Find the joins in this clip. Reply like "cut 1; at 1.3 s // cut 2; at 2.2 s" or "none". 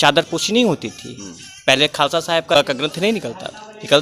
cut 1; at 2.6 s